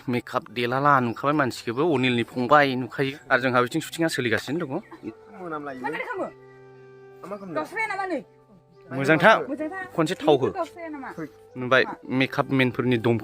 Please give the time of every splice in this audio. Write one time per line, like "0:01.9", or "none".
0:03.2
0:05.0